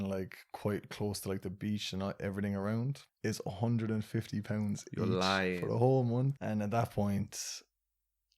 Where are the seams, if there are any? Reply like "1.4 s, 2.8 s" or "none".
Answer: 3.0 s, 6.4 s